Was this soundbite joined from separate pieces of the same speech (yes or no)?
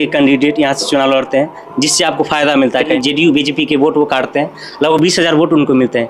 yes